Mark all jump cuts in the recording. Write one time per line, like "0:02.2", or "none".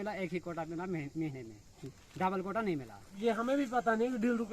0:03.2